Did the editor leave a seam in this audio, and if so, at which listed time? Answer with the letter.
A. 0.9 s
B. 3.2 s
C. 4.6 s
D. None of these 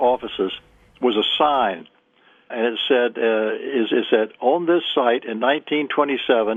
D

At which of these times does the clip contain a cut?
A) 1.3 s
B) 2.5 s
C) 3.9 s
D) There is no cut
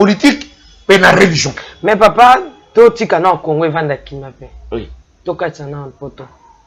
D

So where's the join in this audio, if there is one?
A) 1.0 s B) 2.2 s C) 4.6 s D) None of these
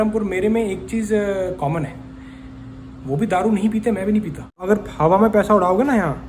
C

